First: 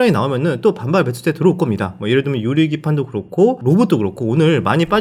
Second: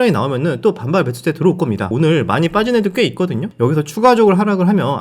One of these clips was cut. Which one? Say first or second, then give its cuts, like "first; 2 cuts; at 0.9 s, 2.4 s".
second; 2 cuts; at 1.9 s, 3.5 s